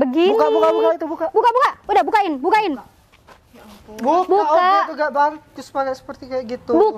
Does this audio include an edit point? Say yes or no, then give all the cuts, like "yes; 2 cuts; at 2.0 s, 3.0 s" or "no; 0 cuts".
no; 0 cuts